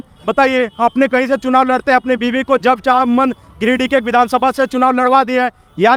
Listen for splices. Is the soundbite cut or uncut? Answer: uncut